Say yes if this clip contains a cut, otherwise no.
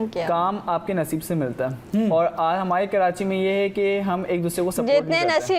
no